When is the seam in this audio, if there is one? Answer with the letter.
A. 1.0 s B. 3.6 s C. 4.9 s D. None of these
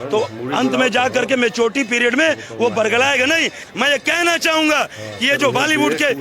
B